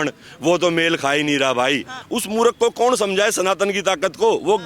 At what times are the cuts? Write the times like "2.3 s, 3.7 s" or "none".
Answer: 2.0 s